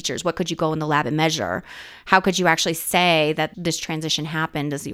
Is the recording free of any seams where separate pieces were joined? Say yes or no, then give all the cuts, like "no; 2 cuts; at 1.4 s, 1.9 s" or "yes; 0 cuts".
no; 1 cut; at 3.5 s